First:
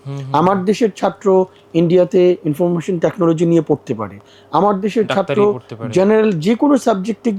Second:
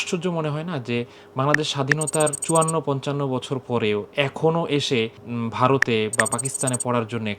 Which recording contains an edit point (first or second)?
second